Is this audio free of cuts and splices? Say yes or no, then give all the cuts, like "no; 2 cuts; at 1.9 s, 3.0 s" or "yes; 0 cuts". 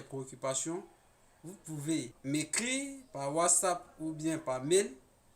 no; 1 cut; at 2.1 s